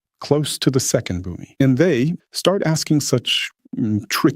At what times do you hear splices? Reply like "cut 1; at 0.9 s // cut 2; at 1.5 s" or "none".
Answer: cut 1; at 1.4 s // cut 2; at 2.2 s

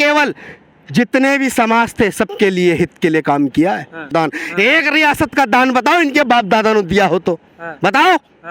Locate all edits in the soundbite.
cut 1; at 4.1 s

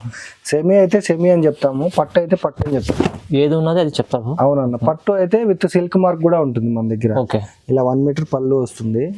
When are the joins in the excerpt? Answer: none

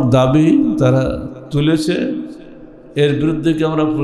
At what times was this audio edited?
none

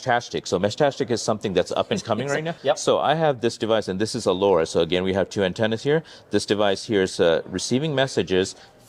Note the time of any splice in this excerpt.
cut 1; at 2.5 s

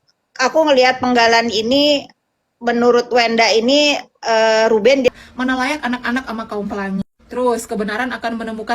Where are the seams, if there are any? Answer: cut 1; at 5.1 s

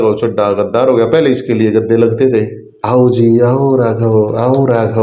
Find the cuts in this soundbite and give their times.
none

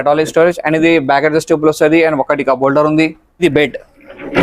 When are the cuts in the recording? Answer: cut 1; at 3.4 s

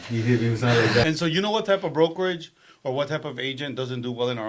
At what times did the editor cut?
cut 1; at 1.1 s

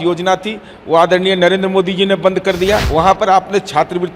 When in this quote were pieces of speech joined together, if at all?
cut 1; at 2.9 s

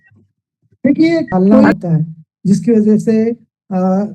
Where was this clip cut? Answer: cut 1; at 1.3 s

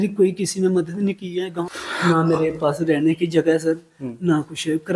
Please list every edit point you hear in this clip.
cut 1; at 1.6 s

